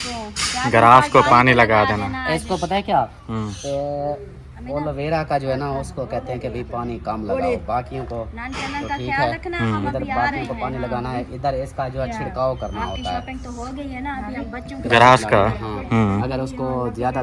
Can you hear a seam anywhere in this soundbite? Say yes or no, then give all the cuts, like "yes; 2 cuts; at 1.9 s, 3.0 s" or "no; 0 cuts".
no; 0 cuts